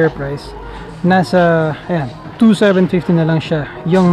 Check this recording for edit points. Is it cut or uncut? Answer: uncut